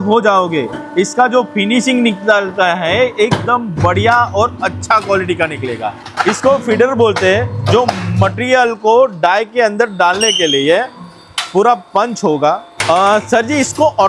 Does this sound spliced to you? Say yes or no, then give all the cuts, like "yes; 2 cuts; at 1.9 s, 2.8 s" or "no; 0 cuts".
no; 0 cuts